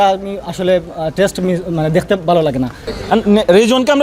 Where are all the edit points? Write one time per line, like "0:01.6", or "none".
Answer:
0:02.9